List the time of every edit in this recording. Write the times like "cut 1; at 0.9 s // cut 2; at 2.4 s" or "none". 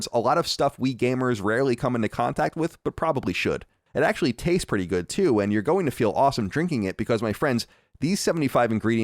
cut 1; at 3.7 s